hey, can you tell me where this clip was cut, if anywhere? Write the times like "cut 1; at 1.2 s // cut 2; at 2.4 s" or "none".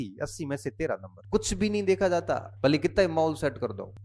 cut 1; at 1.1 s // cut 2; at 2.5 s